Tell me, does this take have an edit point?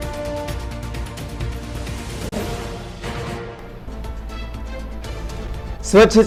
no; 0 cuts

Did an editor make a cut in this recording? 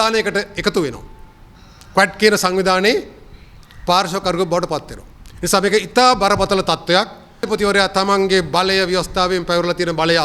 yes; 1 cut; at 7.4 s

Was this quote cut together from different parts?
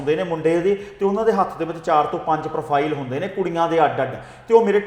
no; 0 cuts

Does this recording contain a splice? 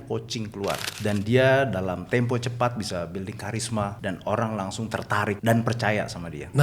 yes; 3 cuts; at 0.9 s, 4.0 s, 5.4 s

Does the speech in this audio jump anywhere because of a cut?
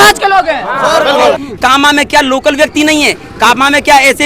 yes; 1 cut; at 1.3 s

